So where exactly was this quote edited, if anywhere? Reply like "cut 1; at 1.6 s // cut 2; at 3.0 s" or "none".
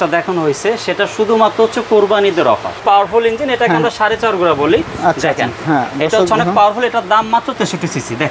cut 1; at 2.8 s // cut 2; at 7.6 s